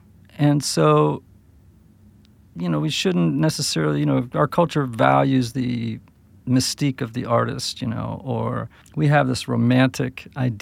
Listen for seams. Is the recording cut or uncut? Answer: cut